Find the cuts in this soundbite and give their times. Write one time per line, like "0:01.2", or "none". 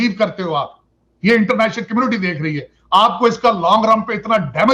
none